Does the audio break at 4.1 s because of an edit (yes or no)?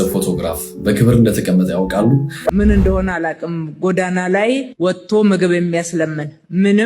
no